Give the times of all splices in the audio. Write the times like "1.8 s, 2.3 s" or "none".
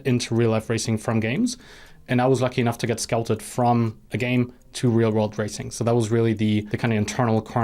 6.7 s

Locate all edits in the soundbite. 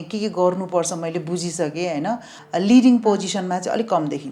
2.4 s

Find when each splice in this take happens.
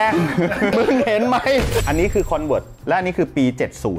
0.7 s, 1.8 s

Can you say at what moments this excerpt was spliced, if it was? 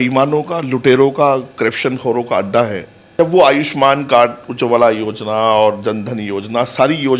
3.0 s

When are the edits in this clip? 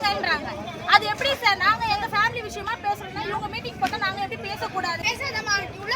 5.0 s

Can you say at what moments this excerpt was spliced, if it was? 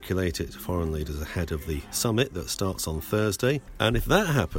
3.7 s

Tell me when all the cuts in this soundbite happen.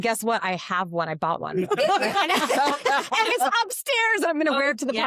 none

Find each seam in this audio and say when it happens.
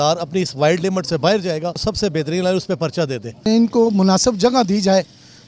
1.8 s, 3.3 s

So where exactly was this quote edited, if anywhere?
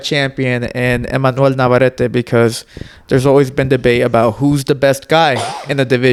none

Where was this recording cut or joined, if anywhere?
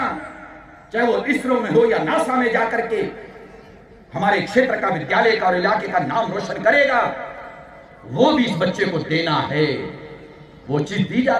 none

